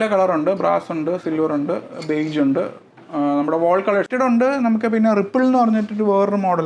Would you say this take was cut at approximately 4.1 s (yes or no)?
yes